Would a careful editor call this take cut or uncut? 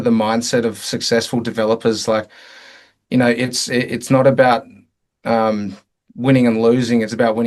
uncut